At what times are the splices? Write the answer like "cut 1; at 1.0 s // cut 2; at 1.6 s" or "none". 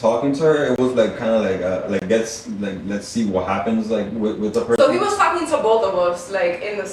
none